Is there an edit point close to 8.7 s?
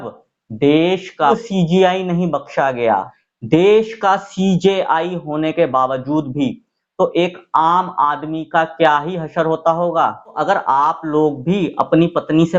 no; 3 cuts; at 1.4 s, 3.2 s, 10.4 s

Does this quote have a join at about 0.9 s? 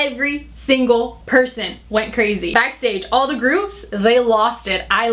no; 1 cut; at 2.5 s

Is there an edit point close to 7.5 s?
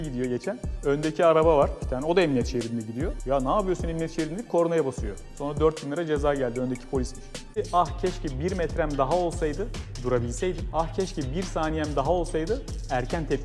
yes; 1 cut; at 7.5 s

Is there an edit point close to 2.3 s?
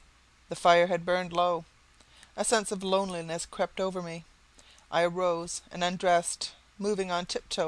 no; 0 cuts

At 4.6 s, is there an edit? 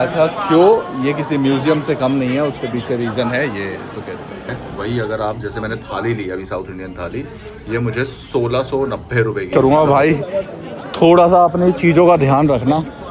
yes; 2 cuts; at 4.6 s, 9.5 s

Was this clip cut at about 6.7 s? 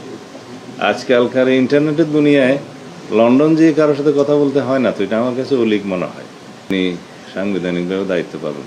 yes; 1 cut; at 6.7 s

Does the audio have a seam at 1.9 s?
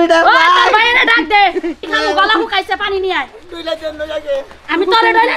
yes; 1 cut; at 1.9 s

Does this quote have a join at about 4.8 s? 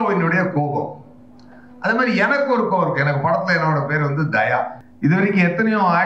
yes; 1 cut; at 4.8 s

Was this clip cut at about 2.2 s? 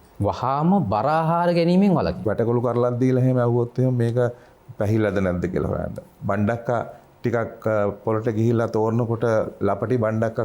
yes; 1 cut; at 2.2 s

